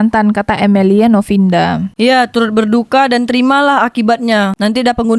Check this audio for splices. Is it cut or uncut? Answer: uncut